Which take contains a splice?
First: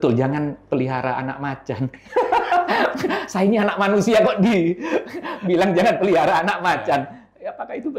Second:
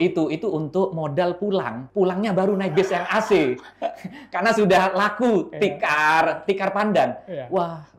second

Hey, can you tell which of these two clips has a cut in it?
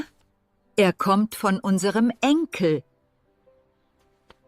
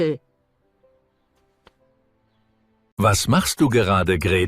second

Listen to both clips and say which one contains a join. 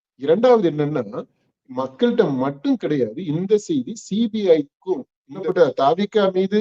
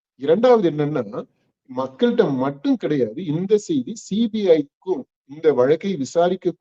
first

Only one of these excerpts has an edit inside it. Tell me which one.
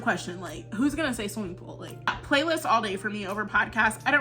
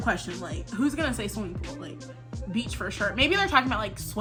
first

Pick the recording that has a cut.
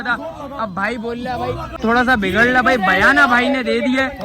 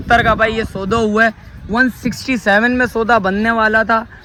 first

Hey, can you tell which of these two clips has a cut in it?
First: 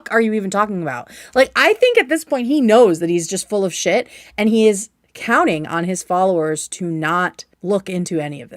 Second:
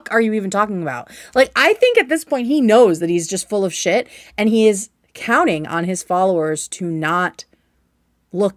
first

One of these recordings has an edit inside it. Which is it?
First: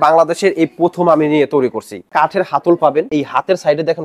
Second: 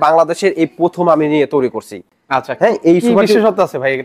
first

